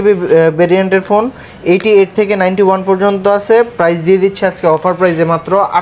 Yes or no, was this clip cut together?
no